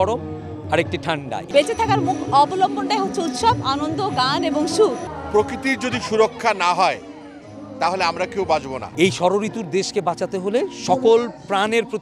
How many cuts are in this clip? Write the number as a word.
three